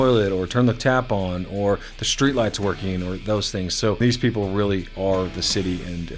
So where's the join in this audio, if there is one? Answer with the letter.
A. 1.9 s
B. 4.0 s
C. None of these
B